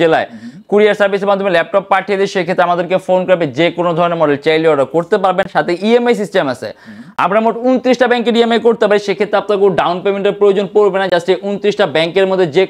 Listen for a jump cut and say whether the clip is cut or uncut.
uncut